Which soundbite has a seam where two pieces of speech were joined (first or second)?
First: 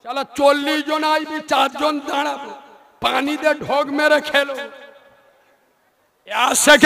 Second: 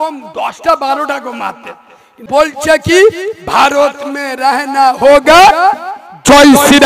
second